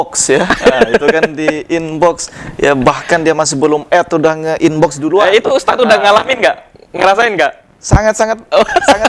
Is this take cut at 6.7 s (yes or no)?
no